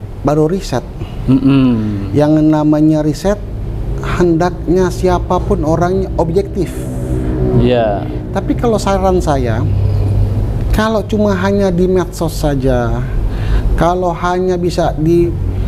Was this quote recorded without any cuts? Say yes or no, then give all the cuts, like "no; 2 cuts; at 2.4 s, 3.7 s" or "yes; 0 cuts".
yes; 0 cuts